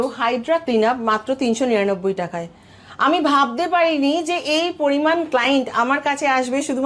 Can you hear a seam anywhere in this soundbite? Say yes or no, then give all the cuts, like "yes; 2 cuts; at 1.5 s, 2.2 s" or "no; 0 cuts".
no; 0 cuts